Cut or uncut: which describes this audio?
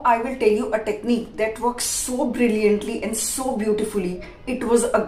uncut